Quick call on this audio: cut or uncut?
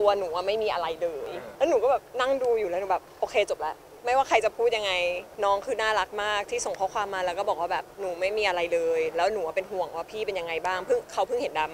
cut